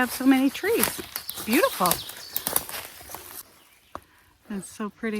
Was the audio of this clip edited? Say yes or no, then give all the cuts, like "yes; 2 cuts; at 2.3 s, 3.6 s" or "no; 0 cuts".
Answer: yes; 1 cut; at 3.3 s